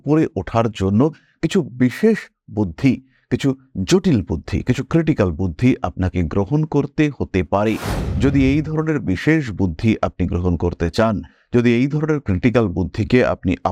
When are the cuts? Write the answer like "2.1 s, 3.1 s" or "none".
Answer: none